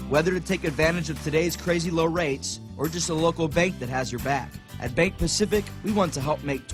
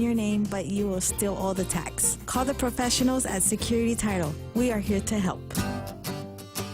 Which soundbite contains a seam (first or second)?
second